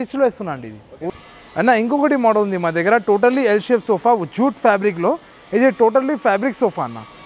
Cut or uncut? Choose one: uncut